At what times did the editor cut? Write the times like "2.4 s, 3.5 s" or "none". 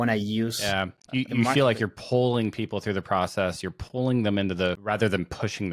4.8 s